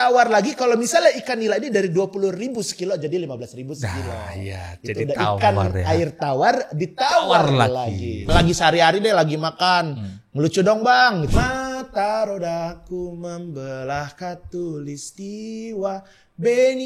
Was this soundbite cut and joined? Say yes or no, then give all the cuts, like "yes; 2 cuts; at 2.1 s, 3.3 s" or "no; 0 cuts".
yes; 2 cuts; at 8.3 s, 11.3 s